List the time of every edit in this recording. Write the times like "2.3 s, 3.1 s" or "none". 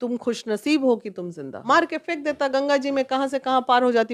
1.5 s